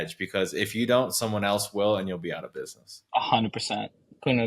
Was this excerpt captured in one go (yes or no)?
yes